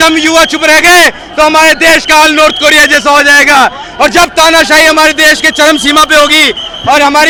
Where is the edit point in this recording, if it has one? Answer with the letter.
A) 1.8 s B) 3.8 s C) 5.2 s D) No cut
D